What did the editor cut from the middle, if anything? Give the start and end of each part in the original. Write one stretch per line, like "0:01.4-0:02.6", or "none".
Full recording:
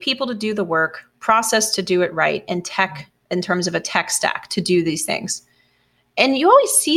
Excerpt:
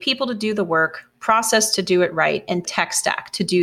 0:02.7-0:03.9